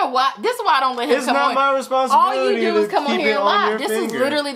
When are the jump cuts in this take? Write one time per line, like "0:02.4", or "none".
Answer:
none